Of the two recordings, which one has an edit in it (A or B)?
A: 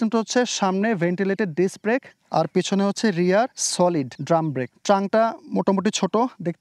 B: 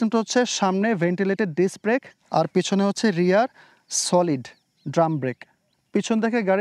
A